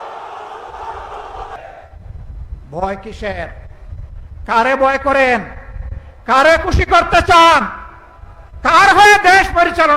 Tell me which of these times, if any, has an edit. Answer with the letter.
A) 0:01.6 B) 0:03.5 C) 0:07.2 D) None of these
A